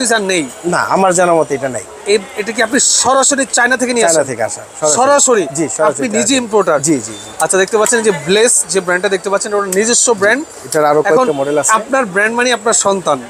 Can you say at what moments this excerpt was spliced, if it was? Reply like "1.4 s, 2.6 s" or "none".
none